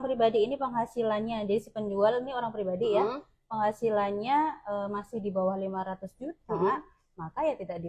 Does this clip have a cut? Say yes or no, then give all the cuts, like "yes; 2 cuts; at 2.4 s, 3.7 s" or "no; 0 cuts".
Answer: no; 0 cuts